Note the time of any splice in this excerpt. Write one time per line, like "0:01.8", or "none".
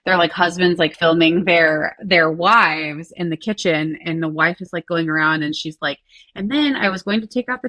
0:00.9